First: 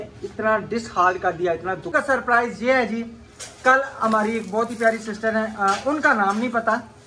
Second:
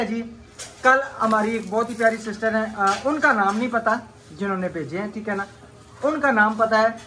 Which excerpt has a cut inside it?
first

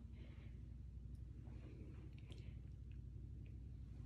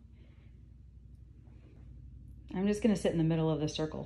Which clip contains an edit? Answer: second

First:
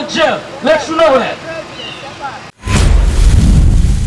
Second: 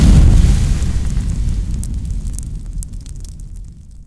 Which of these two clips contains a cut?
first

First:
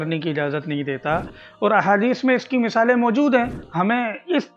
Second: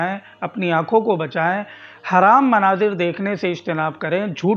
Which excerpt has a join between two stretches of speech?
first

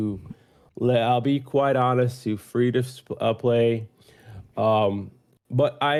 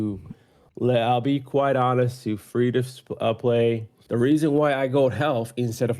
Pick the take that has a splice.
second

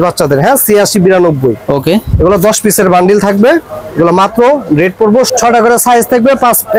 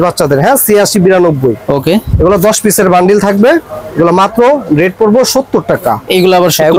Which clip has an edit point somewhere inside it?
first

